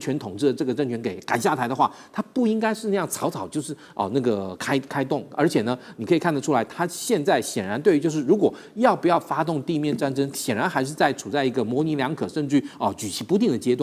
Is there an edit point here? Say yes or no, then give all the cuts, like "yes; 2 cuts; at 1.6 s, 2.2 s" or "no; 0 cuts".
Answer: no; 0 cuts